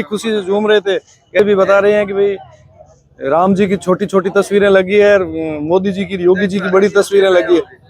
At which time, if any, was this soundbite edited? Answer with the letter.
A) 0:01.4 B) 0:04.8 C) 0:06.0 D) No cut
A